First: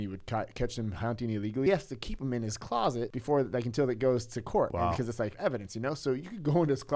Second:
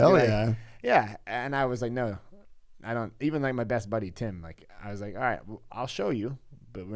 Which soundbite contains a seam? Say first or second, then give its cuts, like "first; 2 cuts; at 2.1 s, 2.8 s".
first; 3 cuts; at 1.7 s, 3.2 s, 5.0 s